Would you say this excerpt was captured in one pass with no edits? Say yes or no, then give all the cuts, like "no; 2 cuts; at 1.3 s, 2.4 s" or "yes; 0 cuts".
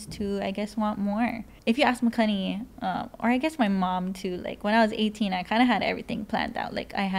no; 1 cut; at 1.5 s